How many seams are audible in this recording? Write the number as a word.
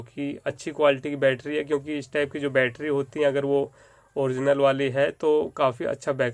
zero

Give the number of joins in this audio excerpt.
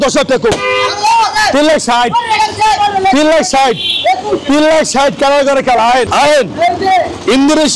zero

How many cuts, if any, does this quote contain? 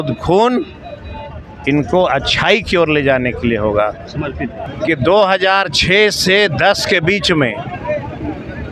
one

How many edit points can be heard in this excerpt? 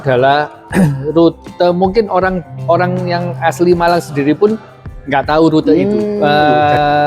one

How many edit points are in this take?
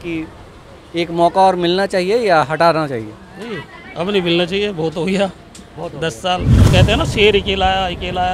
one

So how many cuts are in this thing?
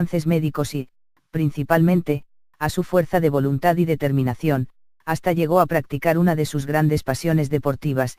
one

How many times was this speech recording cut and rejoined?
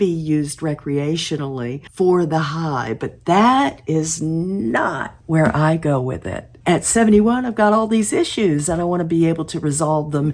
three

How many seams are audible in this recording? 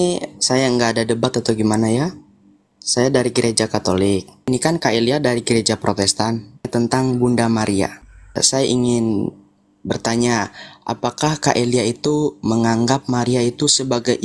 three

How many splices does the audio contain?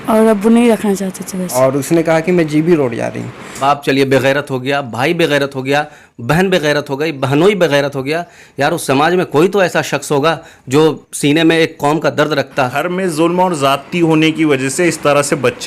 three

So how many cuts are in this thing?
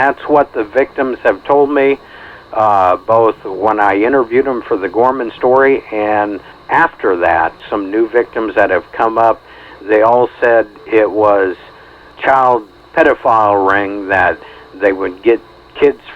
four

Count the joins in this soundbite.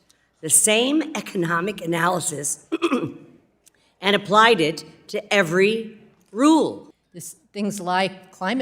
one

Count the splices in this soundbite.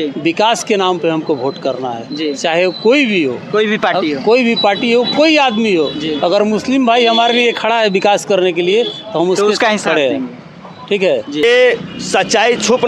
one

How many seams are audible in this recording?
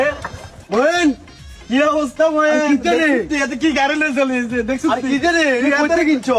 zero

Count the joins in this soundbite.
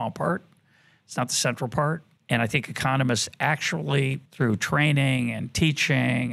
two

